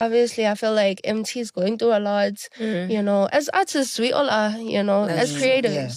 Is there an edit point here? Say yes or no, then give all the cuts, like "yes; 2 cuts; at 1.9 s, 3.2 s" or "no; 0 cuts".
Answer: no; 0 cuts